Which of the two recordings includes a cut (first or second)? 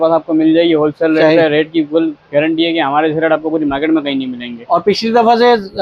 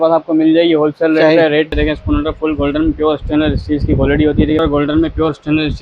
second